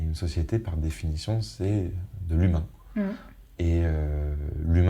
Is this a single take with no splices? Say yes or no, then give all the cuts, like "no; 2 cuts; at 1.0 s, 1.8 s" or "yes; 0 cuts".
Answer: yes; 0 cuts